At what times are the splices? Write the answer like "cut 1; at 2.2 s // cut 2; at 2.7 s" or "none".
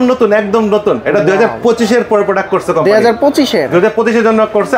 none